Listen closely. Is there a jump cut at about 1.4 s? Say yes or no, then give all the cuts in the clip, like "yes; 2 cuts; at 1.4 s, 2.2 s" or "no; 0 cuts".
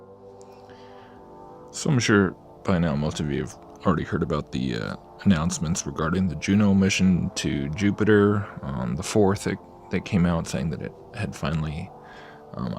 no; 1 cut; at 2.6 s